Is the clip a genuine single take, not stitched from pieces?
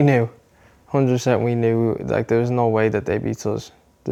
yes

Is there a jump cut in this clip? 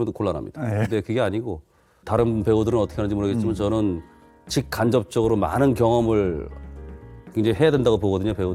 no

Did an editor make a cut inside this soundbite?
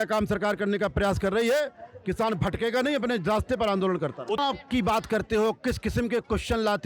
yes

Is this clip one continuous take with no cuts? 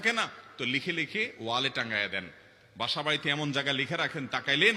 yes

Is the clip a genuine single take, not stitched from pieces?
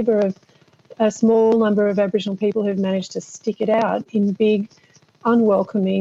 yes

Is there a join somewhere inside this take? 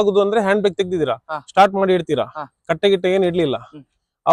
no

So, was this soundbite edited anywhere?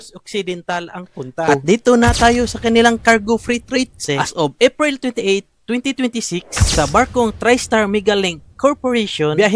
yes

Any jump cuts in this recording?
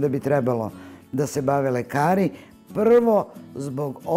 no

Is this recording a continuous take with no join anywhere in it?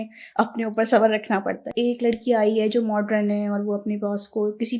no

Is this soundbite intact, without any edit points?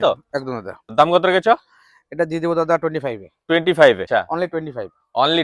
no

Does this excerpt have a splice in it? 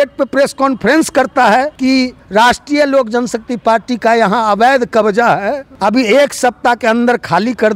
yes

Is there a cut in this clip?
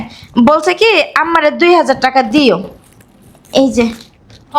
no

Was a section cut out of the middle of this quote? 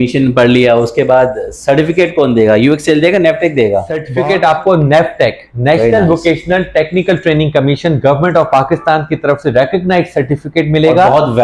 yes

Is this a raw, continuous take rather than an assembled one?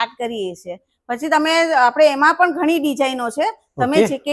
yes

